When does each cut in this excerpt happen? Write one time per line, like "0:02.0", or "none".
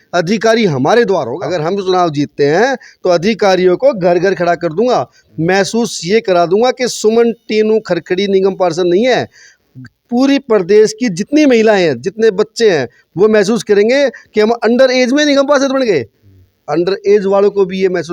0:01.4